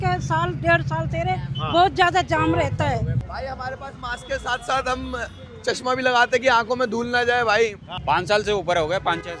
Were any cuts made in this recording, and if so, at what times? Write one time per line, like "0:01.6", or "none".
0:03.2
0:07.9